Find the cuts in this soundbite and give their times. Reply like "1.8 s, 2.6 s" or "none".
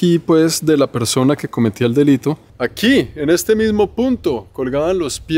2.5 s